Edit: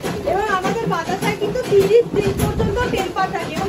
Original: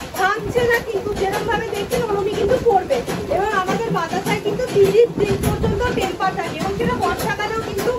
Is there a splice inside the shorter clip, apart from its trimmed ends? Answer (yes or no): no